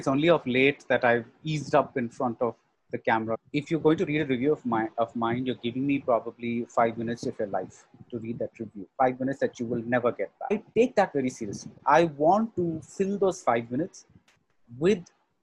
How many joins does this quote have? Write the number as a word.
two